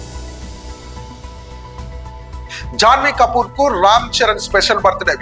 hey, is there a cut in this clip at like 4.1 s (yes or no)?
no